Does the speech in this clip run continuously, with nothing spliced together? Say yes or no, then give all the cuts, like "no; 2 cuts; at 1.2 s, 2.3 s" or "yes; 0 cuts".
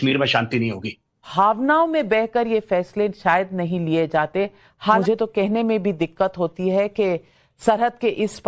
no; 2 cuts; at 1.2 s, 5.0 s